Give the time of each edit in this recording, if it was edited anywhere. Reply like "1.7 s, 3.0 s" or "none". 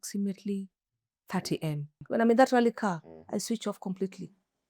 2.0 s